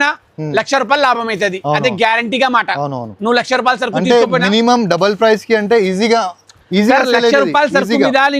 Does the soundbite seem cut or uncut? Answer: uncut